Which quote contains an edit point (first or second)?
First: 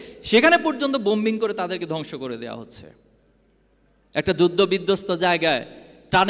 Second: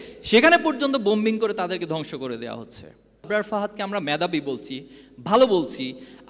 second